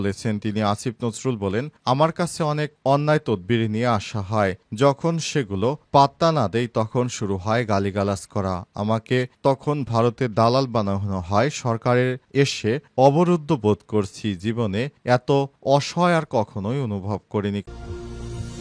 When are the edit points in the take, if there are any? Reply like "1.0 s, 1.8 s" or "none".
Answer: 17.6 s